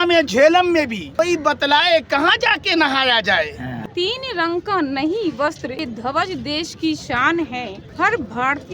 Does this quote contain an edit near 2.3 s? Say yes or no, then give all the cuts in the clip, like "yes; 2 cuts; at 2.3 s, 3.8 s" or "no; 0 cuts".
no; 4 cuts; at 1.0 s, 3.7 s, 5.8 s, 7.8 s